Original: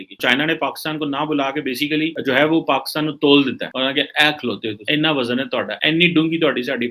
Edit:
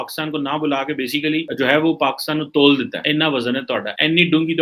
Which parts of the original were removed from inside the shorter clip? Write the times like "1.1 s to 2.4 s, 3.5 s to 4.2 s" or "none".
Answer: 3.6 s to 4.8 s